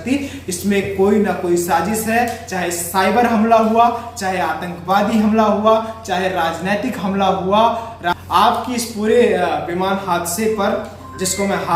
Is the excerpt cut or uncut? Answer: uncut